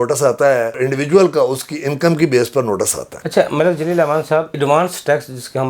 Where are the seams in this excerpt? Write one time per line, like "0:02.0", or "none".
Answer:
none